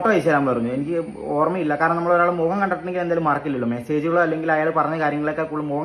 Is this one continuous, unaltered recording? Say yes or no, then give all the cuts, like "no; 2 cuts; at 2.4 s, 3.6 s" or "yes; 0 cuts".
yes; 0 cuts